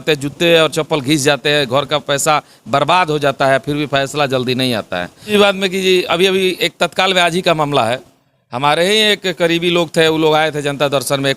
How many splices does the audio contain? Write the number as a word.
one